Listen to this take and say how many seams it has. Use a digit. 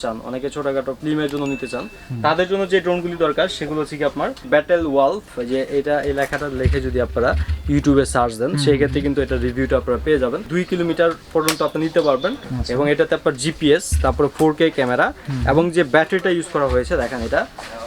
4